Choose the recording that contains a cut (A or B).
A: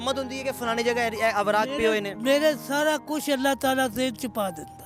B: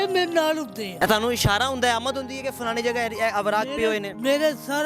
B